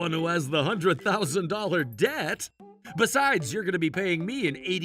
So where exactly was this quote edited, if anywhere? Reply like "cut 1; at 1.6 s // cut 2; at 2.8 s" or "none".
cut 1; at 2.7 s